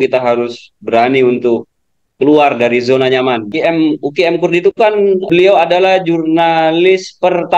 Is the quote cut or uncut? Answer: cut